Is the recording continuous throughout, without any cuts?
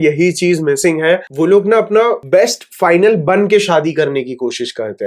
no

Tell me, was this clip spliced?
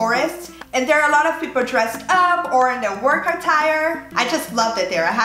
yes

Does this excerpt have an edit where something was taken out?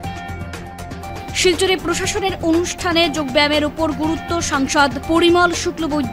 yes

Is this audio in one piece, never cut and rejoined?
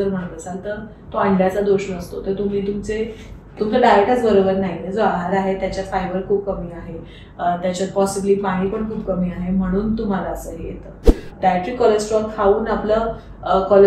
no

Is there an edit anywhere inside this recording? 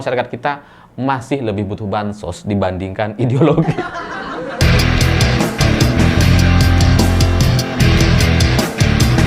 yes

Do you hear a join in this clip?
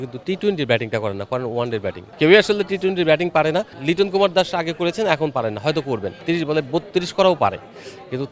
yes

